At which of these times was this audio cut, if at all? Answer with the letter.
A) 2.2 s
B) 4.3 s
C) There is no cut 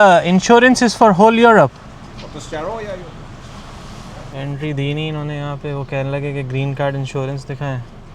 B